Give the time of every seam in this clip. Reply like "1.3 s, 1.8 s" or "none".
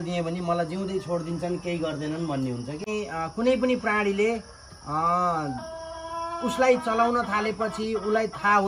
2.9 s